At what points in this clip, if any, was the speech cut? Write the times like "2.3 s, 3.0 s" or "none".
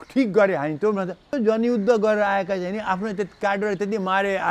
1.3 s